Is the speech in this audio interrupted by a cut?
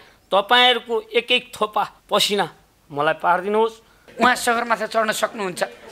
yes; 1 cut; at 4.0 s

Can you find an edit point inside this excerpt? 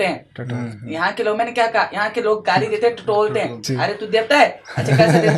no; 0 cuts

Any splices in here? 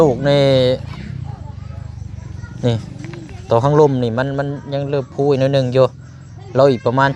no; 0 cuts

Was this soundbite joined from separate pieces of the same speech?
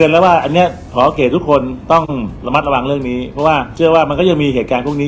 yes; 2 cuts; at 2.3 s, 3.7 s

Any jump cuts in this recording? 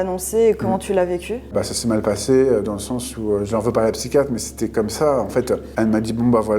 no; 0 cuts

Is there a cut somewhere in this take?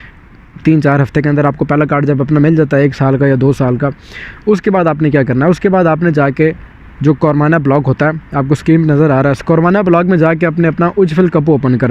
no; 0 cuts

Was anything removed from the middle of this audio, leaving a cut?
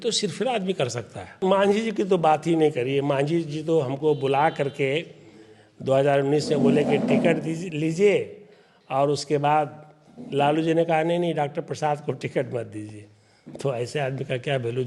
yes; 1 cut; at 1.4 s

